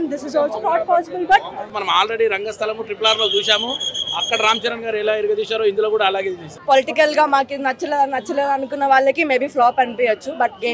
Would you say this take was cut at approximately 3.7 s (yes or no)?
no